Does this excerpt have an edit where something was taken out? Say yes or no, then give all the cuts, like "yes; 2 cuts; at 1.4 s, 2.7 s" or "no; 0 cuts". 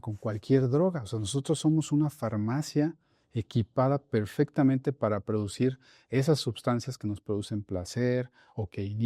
no; 0 cuts